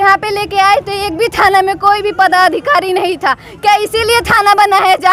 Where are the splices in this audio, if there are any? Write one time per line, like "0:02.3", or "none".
none

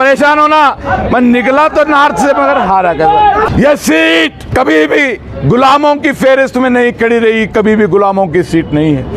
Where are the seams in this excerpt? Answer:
0:03.5
0:04.4

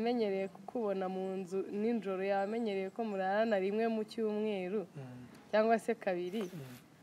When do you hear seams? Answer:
none

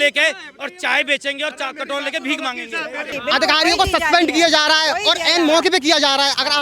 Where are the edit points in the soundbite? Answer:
0:03.1

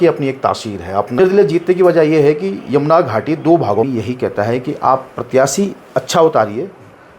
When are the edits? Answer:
0:03.9

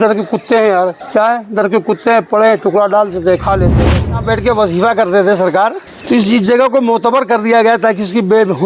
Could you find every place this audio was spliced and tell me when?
0:01.0
0:03.8
0:05.9

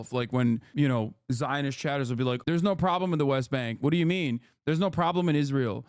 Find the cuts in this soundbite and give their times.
0:02.4

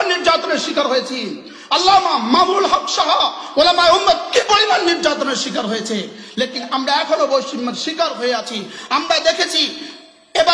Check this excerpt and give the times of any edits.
none

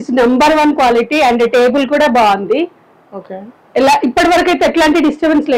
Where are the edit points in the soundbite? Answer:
none

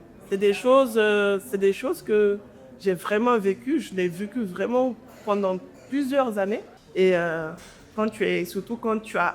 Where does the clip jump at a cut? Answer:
0:06.8

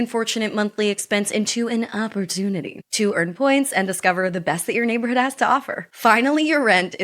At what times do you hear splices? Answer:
0:03.1

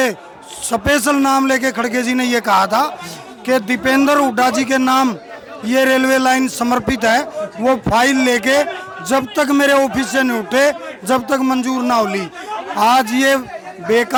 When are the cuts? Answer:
none

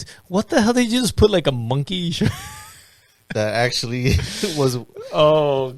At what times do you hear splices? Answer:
none

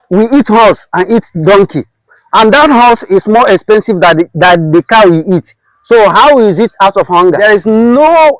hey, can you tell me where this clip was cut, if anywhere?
0:07.4

